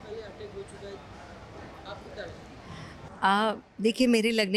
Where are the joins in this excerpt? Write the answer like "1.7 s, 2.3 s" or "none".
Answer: none